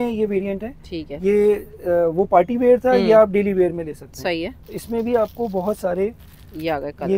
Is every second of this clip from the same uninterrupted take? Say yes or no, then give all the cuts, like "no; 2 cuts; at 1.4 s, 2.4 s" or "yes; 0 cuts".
yes; 0 cuts